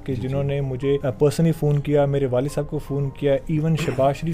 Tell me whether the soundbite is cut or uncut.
cut